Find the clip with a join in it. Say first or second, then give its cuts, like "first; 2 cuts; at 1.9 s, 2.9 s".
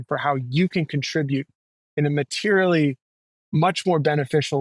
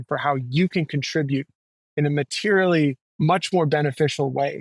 second; 1 cut; at 3.1 s